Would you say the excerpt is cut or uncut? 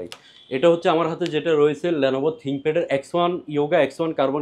uncut